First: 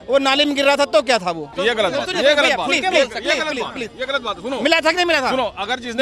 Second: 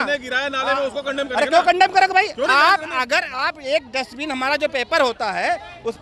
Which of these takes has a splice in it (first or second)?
first